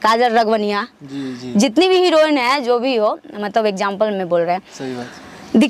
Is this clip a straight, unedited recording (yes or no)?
yes